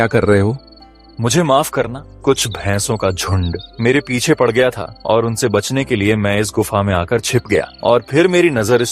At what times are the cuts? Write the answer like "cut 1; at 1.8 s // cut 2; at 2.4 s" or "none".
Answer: cut 1; at 2.0 s // cut 2; at 3.6 s // cut 3; at 4.9 s // cut 4; at 7.7 s